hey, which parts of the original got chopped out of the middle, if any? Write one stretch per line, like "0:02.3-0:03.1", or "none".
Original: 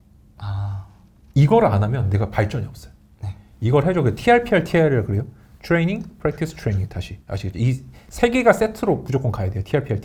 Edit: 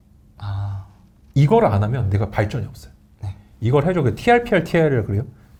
none